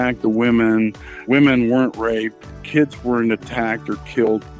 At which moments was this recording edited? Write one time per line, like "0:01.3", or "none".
0:01.2